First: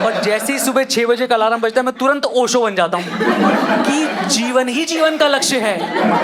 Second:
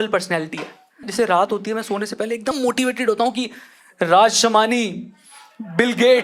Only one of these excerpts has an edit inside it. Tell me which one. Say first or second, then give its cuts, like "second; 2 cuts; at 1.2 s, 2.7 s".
second; 2 cuts; at 1.1 s, 2.6 s